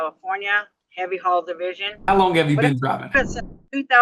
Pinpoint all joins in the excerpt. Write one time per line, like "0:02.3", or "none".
0:02.1
0:03.2